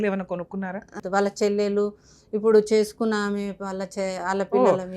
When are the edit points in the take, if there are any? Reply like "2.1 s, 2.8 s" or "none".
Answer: 1.0 s